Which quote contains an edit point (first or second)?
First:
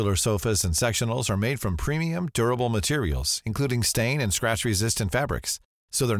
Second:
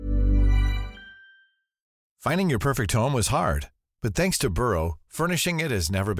second